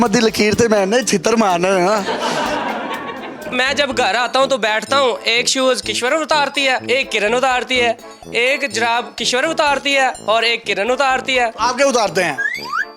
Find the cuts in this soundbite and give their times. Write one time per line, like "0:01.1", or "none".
0:03.5